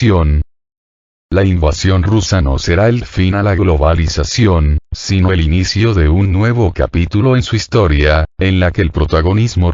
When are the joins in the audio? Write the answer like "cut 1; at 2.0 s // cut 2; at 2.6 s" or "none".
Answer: cut 1; at 1.1 s